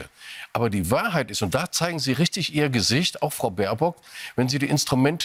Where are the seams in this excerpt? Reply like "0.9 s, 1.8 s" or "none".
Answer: none